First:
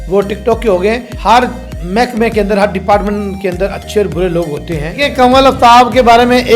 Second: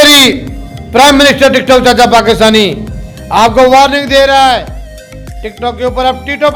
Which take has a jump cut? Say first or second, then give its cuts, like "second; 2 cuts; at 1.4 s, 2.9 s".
first; 2 cuts; at 1.1 s, 5.0 s